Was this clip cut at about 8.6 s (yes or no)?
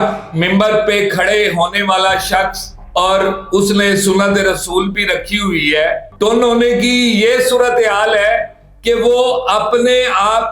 no